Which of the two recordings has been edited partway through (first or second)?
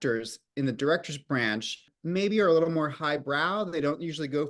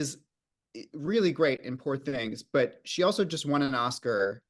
first